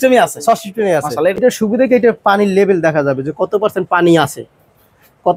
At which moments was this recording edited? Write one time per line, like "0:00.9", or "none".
0:01.4